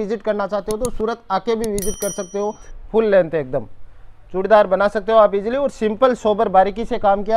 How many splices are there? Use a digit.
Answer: 1